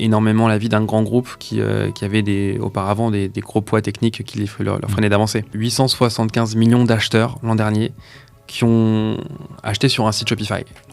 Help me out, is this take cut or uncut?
cut